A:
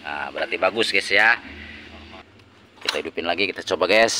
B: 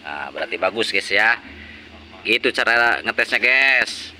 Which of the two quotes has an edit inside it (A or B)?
A